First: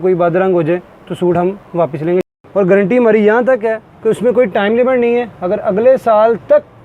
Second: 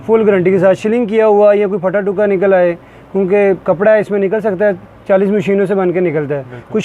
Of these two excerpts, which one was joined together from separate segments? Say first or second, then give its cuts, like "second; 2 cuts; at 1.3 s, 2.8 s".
first; 1 cut; at 2.3 s